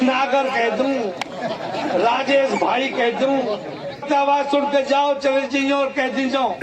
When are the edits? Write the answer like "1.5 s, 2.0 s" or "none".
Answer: 4.1 s